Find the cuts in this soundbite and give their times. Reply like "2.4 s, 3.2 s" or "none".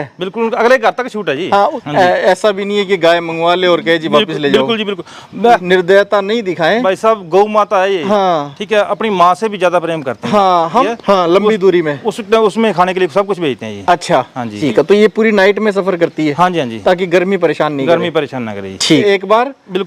1.8 s, 5.6 s, 10.9 s, 14.5 s, 19.0 s